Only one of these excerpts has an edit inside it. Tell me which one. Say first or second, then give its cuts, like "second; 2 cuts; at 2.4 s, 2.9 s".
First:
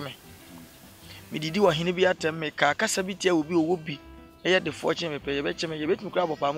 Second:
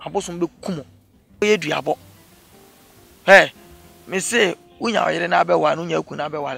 second; 1 cut; at 1.4 s